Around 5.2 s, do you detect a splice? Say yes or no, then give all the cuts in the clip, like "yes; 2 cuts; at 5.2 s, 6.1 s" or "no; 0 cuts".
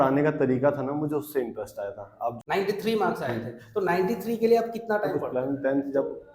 yes; 2 cuts; at 2.3 s, 5.2 s